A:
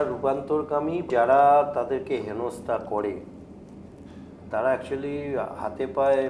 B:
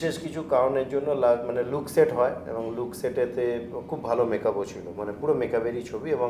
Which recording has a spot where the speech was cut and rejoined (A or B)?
A